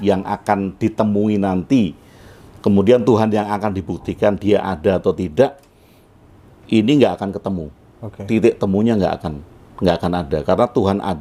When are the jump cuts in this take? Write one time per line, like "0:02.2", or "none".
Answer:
none